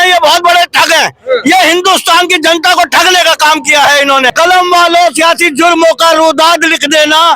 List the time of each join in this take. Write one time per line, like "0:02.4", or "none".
0:04.3

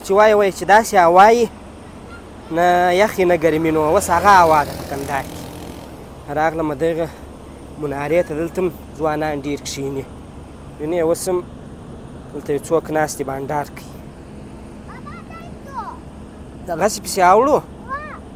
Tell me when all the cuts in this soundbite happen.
none

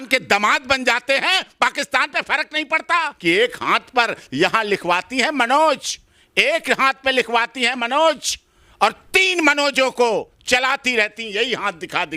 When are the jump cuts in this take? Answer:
0:03.1

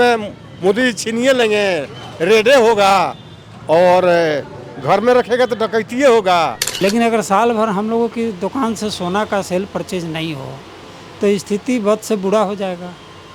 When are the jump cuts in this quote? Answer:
0:06.6

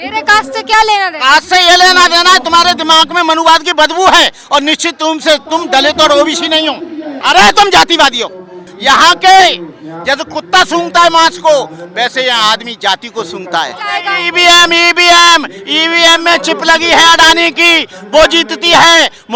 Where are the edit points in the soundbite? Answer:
0:07.2
0:08.7
0:14.0

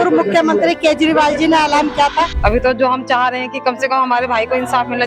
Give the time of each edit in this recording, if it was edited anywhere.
0:02.3

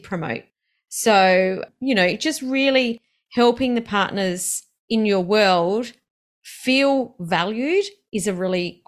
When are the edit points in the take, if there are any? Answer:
none

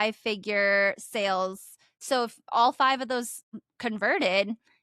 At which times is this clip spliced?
0:02.0
0:03.6

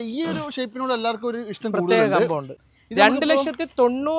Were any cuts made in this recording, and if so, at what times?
0:02.5

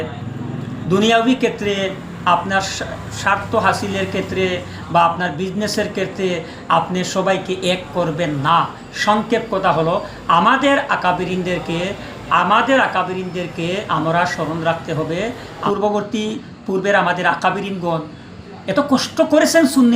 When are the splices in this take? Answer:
0:15.6

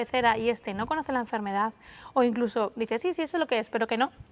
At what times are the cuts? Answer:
none

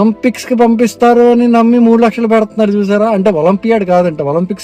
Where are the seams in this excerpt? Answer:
none

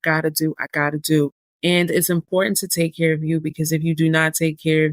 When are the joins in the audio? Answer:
0:01.4

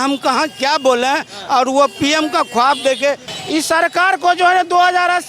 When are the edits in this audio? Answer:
0:03.3

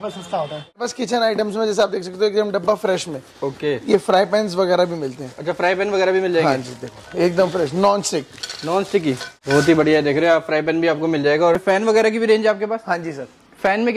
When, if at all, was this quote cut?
0:00.8
0:09.3
0:11.5

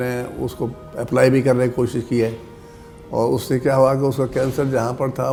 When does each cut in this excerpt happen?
none

